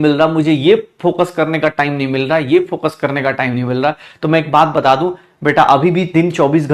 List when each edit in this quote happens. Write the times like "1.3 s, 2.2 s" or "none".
none